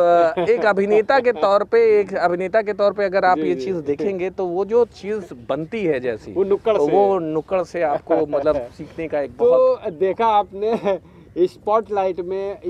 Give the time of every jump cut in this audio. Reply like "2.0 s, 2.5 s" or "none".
none